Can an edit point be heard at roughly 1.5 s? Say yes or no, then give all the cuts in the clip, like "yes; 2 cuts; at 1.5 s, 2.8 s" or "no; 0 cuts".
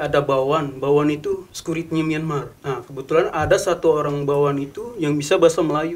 yes; 2 cuts; at 1.5 s, 2.5 s